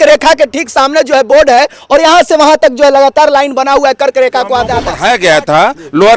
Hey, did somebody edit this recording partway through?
yes; 1 cut; at 4.9 s

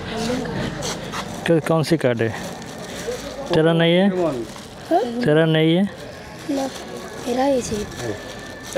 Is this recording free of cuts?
yes; 0 cuts

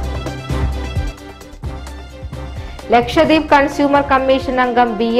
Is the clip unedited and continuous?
no; 1 cut; at 2.5 s

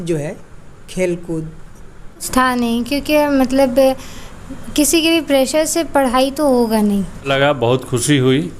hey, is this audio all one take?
no; 2 cuts; at 2.2 s, 7.2 s

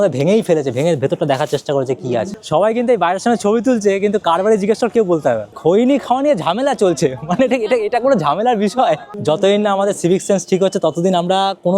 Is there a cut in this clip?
yes; 3 cuts; at 2.4 s, 5.5 s, 9.1 s

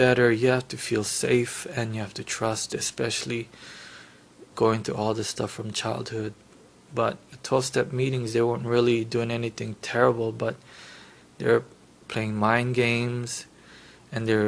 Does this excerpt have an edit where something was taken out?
no; 0 cuts

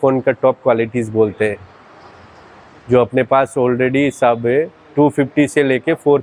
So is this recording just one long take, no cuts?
yes; 0 cuts

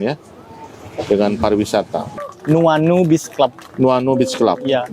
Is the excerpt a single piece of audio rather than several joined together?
no; 1 cut; at 2.1 s

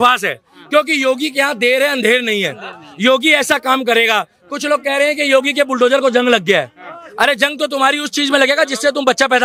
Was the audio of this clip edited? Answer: no; 0 cuts

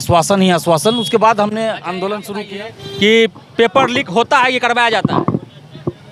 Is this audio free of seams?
no; 1 cut; at 2.3 s

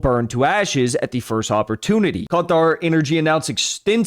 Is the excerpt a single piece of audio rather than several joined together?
no; 1 cut; at 2.2 s

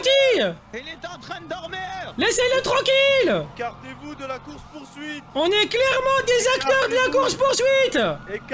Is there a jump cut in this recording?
yes; 3 cuts; at 2.1 s, 3.5 s, 5.3 s

